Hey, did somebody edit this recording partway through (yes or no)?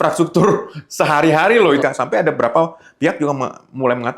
yes